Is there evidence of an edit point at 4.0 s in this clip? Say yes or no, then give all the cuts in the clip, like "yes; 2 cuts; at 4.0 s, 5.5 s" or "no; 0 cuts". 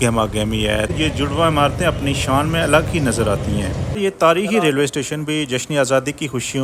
yes; 2 cuts; at 0.9 s, 4.0 s